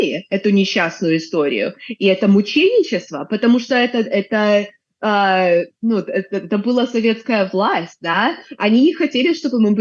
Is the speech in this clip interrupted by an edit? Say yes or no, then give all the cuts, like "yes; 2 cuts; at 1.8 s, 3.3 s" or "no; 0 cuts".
no; 0 cuts